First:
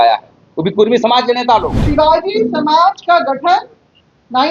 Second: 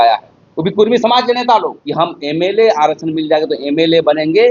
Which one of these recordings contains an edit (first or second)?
first